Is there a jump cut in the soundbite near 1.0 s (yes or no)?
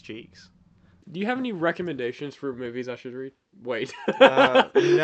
yes